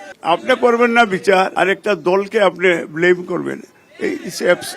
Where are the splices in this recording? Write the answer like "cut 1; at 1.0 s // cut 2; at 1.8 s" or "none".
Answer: cut 1; at 1.5 s